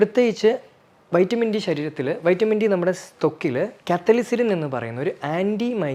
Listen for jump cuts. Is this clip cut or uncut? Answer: uncut